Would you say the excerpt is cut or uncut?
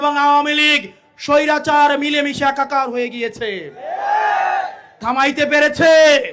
uncut